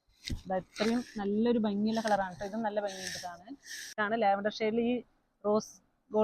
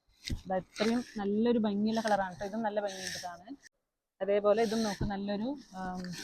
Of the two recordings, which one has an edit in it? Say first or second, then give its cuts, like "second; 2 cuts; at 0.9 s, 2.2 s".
first; 1 cut; at 4.0 s